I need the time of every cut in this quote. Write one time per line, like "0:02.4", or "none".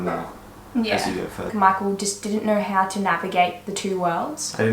0:01.5